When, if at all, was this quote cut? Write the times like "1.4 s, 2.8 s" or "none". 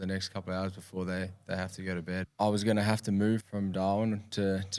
2.2 s, 3.5 s